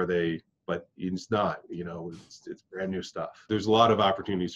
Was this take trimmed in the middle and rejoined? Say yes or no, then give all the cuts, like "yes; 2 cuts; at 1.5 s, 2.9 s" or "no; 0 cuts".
yes; 1 cut; at 3.5 s